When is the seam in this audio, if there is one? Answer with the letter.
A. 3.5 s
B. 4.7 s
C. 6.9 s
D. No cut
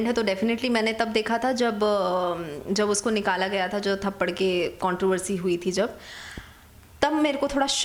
D